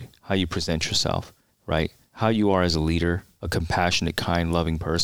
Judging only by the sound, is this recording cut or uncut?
cut